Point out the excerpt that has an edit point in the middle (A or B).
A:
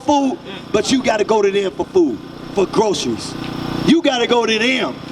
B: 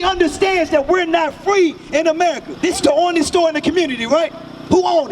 B